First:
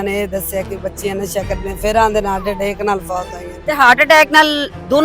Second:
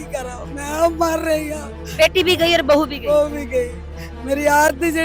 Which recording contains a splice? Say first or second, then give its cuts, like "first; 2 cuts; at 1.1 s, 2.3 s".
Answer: first; 1 cut; at 3.5 s